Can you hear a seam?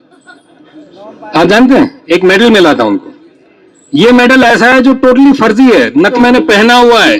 yes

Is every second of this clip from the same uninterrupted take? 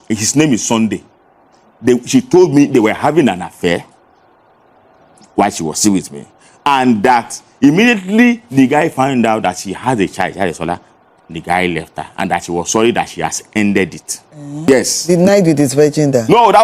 no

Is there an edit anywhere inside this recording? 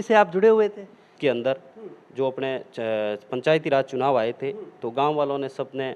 yes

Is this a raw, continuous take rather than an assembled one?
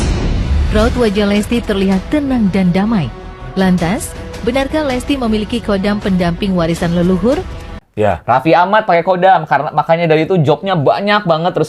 no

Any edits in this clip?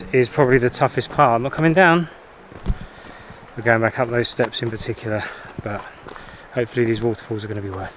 no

